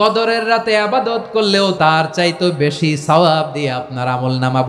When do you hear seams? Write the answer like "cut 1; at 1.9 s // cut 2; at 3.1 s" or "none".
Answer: cut 1; at 1.8 s